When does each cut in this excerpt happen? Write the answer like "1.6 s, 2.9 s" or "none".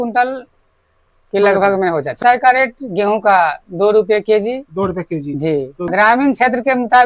2.1 s, 5.9 s

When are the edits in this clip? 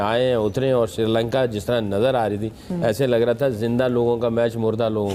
none

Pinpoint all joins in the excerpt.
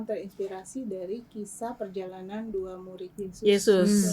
3.1 s

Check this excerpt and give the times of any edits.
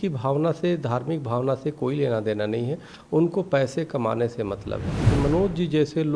5.0 s

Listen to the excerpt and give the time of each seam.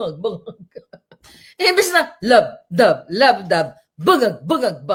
none

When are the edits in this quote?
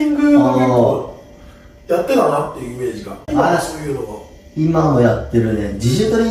3.3 s

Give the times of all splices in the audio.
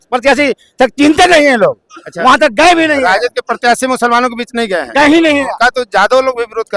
none

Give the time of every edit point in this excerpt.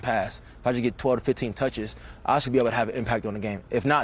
none

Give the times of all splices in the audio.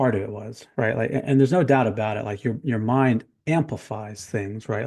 none

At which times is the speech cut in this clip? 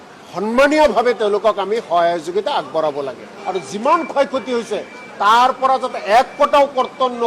3.3 s

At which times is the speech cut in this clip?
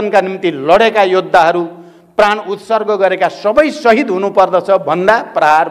none

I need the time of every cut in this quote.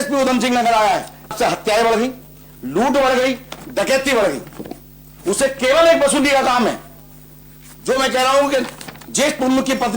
1.3 s

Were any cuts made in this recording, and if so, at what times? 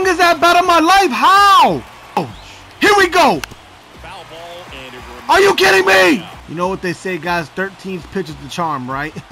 2.3 s, 6.4 s

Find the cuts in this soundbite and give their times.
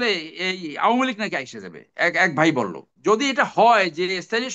2.8 s

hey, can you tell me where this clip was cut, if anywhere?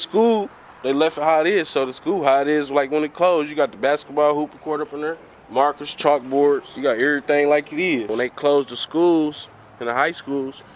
none

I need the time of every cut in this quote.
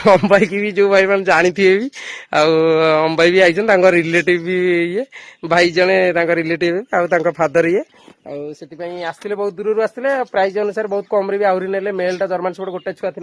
none

